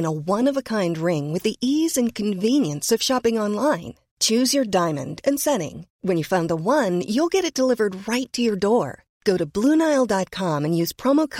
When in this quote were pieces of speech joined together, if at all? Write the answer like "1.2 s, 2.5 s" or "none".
none